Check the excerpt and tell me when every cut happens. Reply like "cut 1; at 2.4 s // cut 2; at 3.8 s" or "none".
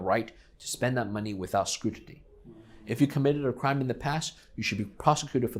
none